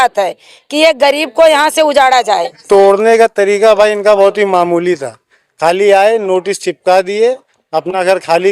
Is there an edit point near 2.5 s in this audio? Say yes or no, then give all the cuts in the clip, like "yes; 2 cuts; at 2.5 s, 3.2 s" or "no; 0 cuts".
yes; 1 cut; at 2.5 s